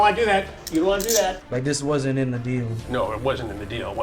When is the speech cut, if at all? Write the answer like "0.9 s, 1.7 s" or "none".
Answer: 1.4 s, 2.8 s